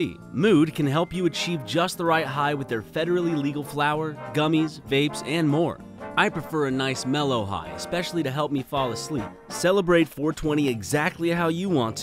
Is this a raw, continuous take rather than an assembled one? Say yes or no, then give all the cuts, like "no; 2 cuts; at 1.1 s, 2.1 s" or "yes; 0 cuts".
no; 2 cuts; at 6.0 s, 9.3 s